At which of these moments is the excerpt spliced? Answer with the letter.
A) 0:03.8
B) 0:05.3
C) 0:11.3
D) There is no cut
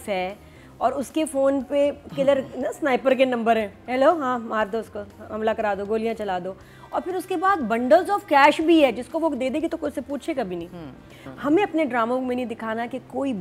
C